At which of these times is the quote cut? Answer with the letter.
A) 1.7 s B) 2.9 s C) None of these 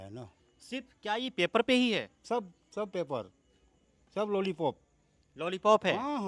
C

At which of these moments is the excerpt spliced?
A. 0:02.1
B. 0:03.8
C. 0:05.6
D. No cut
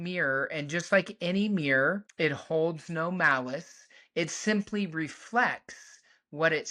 A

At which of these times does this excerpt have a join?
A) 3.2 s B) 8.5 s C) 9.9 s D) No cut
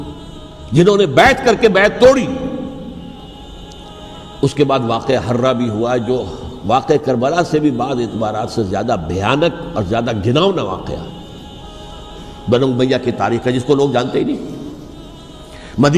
A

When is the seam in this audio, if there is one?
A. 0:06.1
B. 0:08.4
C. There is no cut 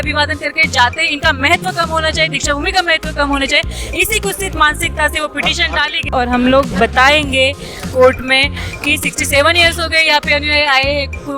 A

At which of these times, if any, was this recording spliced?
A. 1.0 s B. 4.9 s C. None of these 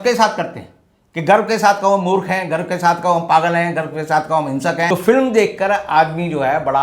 B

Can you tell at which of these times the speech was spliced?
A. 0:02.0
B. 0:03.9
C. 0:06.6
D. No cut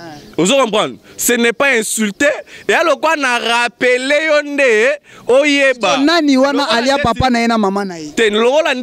D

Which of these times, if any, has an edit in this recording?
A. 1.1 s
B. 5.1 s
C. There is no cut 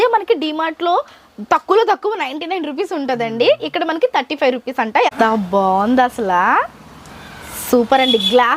B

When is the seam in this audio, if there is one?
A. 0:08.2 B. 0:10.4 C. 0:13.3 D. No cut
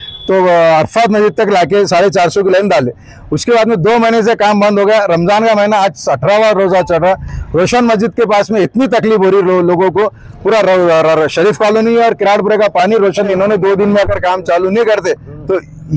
C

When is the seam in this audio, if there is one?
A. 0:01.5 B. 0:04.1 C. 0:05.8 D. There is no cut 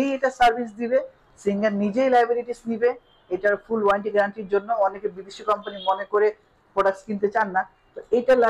D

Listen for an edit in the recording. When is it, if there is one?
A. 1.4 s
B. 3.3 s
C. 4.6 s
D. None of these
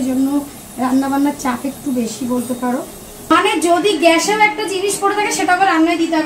B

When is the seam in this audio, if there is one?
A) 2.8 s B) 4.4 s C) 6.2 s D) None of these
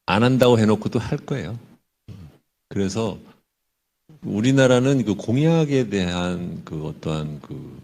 A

